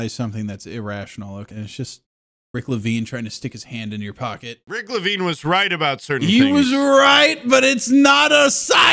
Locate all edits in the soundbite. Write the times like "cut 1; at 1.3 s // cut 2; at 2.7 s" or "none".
cut 1; at 1.5 s // cut 2; at 4.6 s

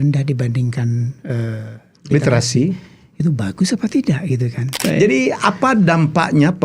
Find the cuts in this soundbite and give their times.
cut 1; at 4.7 s

